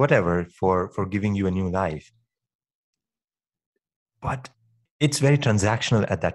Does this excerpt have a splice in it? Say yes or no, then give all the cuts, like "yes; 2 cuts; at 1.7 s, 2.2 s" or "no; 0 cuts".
yes; 1 cut; at 4.9 s